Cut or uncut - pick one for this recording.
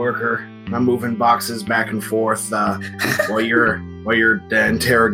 cut